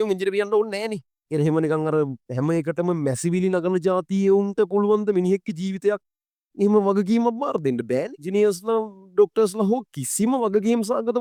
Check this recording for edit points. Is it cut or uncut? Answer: uncut